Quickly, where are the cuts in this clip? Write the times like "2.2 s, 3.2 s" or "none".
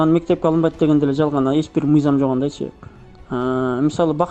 none